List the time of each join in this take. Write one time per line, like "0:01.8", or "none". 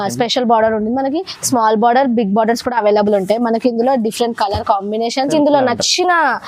0:05.3